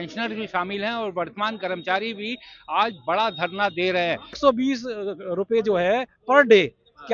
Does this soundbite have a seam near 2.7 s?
no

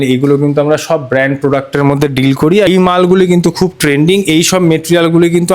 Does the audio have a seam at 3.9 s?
no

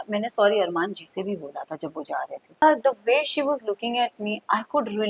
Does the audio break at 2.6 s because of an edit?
yes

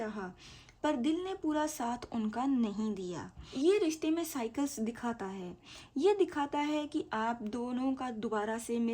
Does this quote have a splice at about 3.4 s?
yes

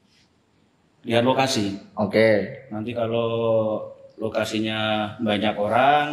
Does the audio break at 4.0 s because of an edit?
no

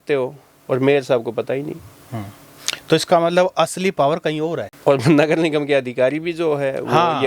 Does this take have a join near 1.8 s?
no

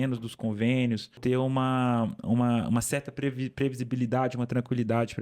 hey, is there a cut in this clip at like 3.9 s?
no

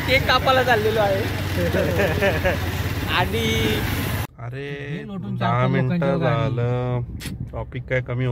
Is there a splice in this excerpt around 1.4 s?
no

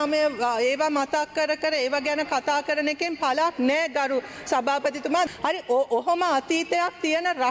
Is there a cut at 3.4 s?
no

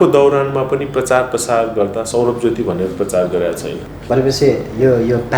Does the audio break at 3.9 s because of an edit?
yes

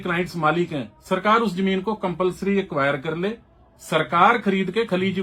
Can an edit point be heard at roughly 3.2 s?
no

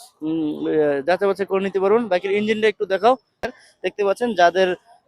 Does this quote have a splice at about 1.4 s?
no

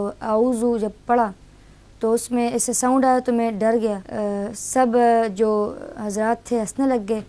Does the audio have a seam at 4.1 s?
yes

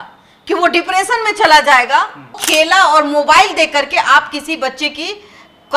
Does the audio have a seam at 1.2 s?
no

